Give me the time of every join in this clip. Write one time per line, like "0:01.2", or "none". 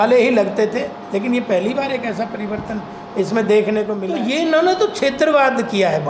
0:04.0